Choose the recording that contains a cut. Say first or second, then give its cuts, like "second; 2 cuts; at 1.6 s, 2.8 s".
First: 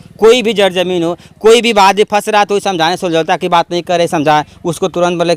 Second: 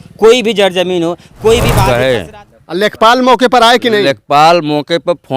second; 1 cut; at 1.8 s